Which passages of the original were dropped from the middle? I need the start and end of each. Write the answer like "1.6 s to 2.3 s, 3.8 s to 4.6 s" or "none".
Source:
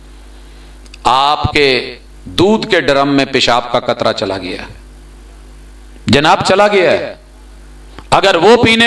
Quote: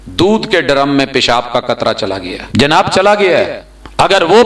4.5 s to 5.9 s, 6.8 s to 7.4 s